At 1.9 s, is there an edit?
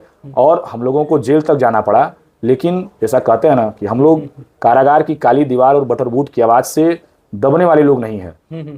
no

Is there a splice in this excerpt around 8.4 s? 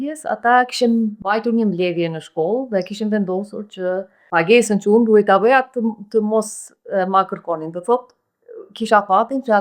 no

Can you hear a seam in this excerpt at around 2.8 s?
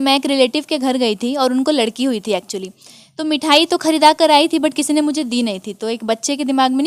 no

